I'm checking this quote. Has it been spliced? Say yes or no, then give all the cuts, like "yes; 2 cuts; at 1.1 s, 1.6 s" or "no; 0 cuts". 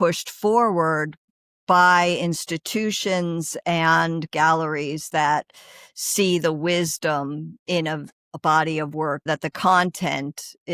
yes; 2 cuts; at 8.1 s, 9.3 s